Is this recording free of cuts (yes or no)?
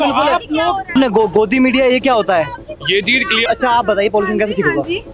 no